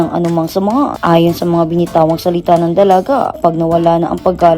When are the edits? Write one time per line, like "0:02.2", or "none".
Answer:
0:01.0
0:03.4